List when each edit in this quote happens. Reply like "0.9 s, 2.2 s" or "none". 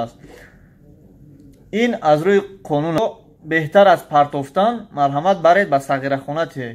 3.0 s